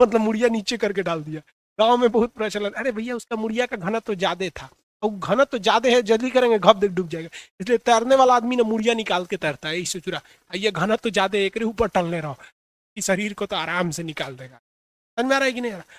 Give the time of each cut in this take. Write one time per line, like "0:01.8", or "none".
none